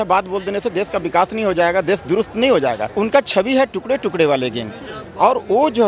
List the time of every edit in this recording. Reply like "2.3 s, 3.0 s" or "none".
2.9 s